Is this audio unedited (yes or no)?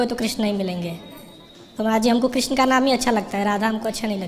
yes